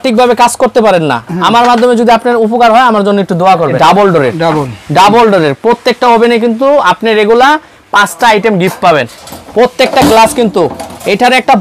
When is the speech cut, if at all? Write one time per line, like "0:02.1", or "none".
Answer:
0:03.7
0:09.2